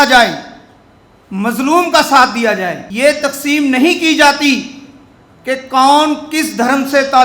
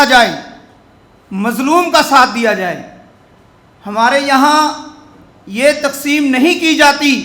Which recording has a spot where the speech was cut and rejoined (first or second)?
first